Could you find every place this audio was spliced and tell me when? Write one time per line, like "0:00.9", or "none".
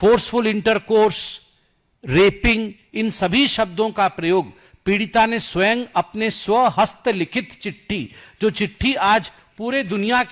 none